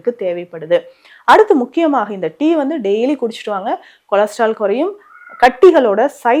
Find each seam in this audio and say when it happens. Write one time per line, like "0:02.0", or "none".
none